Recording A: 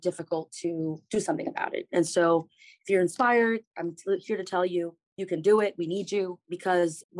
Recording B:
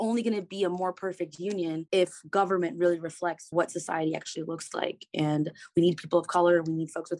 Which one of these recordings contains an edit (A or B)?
B